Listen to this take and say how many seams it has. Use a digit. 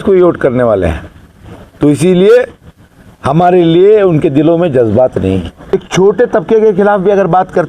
1